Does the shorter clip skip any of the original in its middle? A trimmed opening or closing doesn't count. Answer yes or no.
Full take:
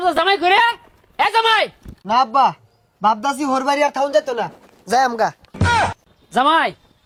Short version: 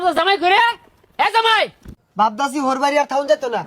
yes